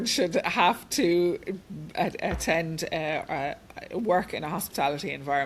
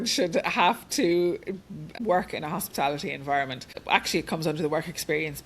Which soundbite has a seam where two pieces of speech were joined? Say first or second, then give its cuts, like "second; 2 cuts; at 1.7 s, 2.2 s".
second; 2 cuts; at 1.8 s, 3.8 s